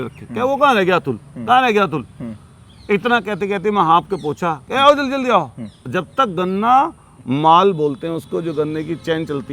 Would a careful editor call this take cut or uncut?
uncut